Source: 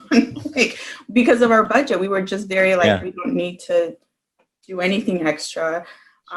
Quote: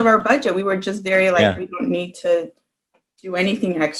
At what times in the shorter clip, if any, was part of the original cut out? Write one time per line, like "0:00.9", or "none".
none